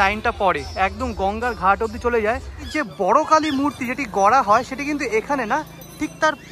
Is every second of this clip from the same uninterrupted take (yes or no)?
no